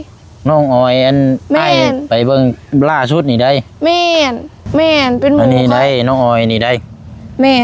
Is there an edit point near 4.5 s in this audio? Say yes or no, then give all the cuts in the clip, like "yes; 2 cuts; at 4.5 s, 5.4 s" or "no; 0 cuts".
yes; 1 cut; at 4.5 s